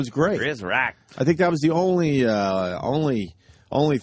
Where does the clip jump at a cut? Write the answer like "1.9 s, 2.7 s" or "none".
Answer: 2.3 s